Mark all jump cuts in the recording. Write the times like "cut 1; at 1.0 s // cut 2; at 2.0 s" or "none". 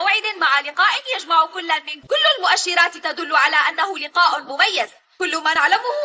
cut 1; at 1.9 s